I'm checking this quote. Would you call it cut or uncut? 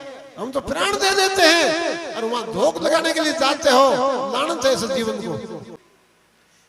cut